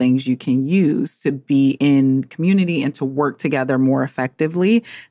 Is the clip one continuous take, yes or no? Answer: no